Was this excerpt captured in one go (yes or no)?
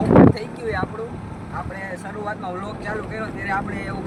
yes